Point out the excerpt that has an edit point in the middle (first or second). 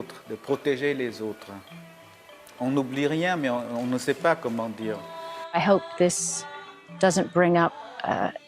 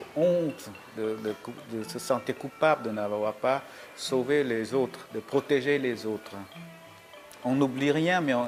first